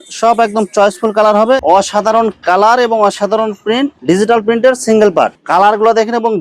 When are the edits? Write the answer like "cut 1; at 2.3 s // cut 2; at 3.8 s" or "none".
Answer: cut 1; at 1.6 s // cut 2; at 5.4 s

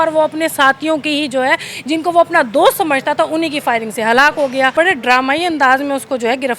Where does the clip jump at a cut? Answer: cut 1; at 4.7 s

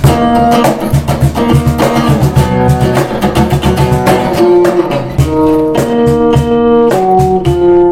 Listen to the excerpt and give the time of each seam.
cut 1; at 4.3 s

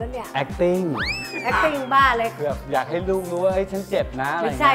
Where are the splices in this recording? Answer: none

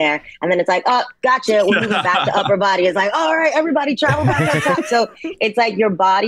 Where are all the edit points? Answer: none

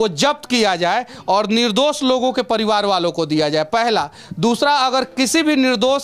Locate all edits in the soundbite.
none

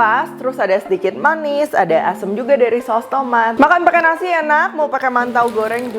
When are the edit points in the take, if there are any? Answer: cut 1; at 3.5 s

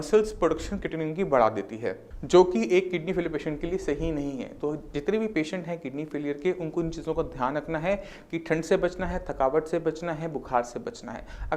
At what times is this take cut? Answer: none

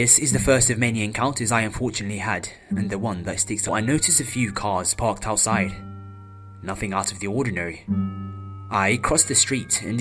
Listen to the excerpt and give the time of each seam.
none

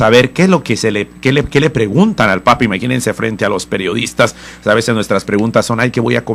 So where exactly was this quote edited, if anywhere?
cut 1; at 2.6 s

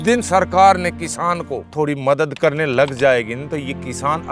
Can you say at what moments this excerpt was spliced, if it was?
cut 1; at 1.7 s // cut 2; at 2.4 s

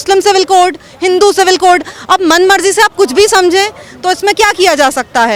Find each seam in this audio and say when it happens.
none

